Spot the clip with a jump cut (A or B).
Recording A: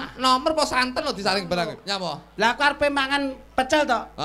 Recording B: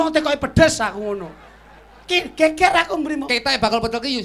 A